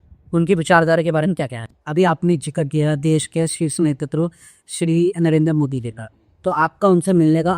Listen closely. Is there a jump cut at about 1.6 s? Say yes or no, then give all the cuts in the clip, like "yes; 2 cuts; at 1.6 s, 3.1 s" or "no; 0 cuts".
yes; 1 cut; at 1.6 s